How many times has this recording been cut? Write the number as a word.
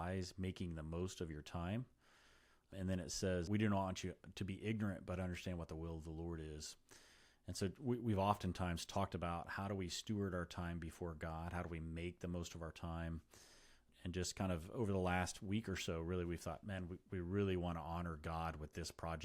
three